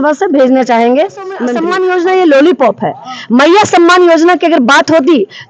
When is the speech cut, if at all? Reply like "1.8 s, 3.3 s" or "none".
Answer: 1.5 s